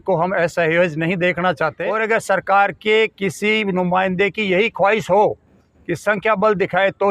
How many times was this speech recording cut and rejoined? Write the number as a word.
one